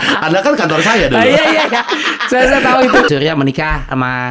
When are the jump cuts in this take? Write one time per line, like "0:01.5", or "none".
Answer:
0:03.1